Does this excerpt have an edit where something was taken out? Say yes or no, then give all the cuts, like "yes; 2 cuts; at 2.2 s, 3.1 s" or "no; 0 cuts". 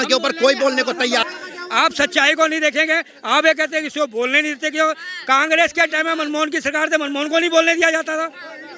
yes; 1 cut; at 1.3 s